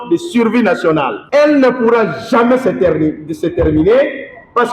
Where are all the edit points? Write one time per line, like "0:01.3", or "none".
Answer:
0:01.2